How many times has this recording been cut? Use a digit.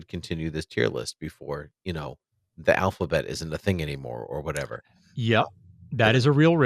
0